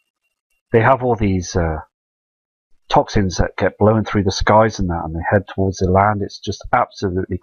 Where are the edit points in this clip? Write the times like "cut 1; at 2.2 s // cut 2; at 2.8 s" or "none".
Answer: none